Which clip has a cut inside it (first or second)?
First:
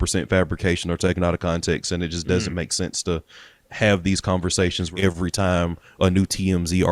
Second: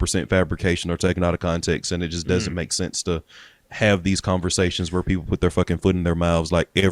first